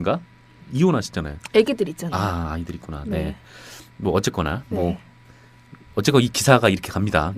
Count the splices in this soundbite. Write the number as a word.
one